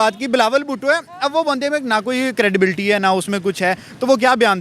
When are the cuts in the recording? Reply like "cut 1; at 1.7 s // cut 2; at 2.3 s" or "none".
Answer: none